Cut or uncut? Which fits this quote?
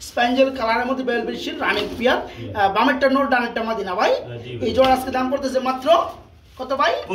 uncut